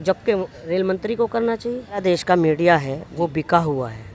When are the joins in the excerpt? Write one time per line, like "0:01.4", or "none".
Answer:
0:02.0